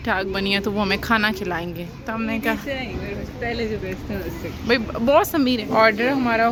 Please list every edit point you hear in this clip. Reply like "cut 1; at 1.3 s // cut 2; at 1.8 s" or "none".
none